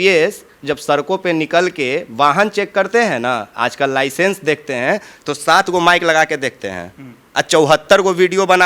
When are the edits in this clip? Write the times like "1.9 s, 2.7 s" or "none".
none

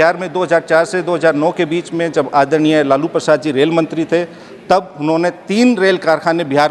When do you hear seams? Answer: none

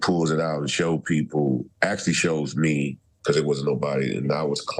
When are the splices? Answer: 1.7 s, 3.0 s

